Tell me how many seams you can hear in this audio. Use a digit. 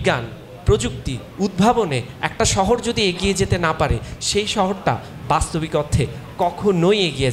0